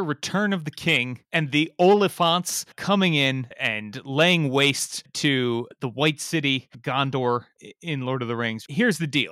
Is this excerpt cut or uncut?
cut